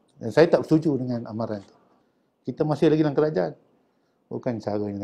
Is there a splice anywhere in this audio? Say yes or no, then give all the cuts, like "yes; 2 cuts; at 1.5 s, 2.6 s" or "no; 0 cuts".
yes; 1 cut; at 1.8 s